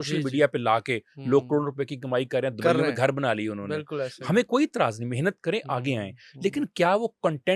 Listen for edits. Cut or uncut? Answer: uncut